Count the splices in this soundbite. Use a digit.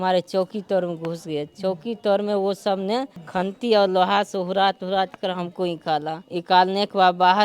2